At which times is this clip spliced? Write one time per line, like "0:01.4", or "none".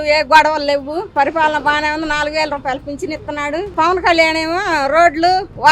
0:01.1
0:03.7